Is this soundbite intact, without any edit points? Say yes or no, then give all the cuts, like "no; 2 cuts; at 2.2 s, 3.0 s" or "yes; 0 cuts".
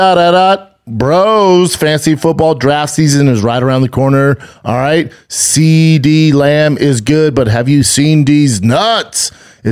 yes; 0 cuts